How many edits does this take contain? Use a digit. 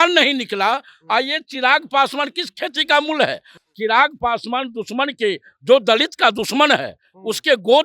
1